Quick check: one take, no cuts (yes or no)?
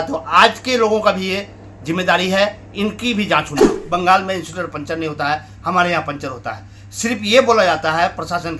no